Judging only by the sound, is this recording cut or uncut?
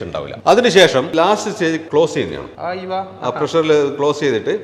cut